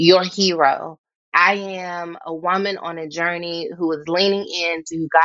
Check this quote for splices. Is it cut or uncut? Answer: cut